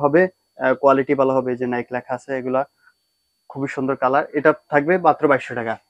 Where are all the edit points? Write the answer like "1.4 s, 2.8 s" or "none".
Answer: none

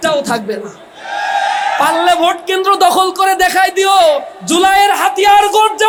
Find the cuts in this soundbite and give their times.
none

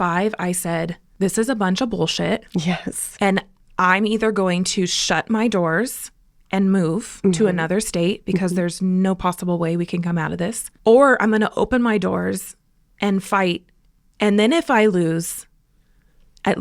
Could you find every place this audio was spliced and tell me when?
1.0 s, 10.6 s

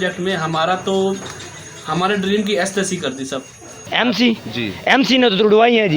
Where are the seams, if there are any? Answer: 3.8 s

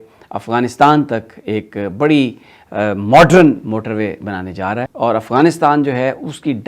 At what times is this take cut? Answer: 4.7 s

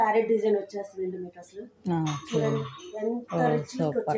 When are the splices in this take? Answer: none

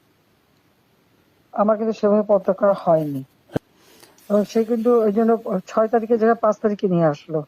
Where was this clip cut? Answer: 3.6 s

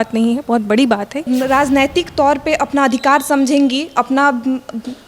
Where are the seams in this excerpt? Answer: 1.3 s

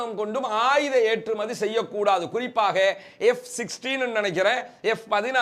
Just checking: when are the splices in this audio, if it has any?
none

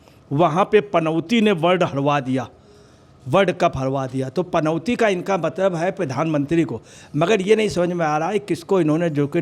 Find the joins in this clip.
none

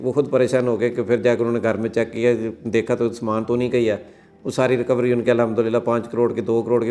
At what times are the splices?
none

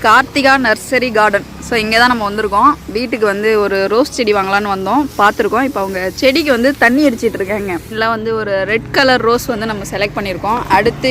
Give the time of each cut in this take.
7.9 s

